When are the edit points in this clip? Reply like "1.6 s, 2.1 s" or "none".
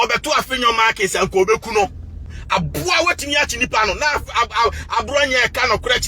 2.4 s